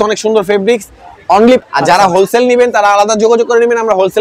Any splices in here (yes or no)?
yes